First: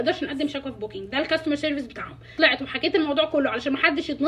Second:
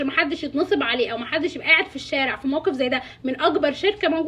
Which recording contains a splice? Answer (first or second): first